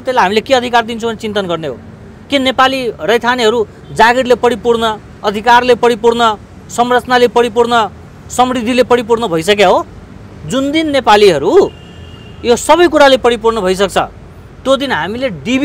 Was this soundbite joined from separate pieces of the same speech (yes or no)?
no